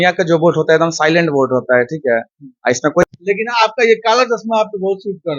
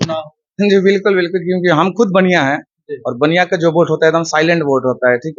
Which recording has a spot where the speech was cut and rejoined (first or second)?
first